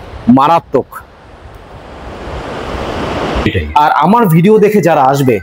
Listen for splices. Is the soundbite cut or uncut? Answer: cut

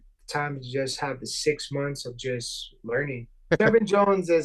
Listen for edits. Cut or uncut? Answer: cut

